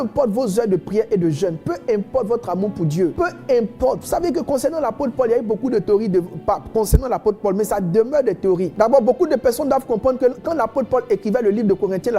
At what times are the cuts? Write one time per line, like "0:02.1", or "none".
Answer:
0:03.1
0:08.7